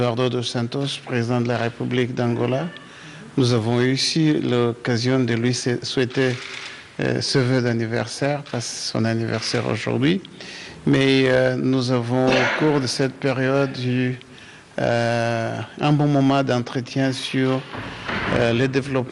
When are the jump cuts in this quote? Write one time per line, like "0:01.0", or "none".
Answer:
0:01.7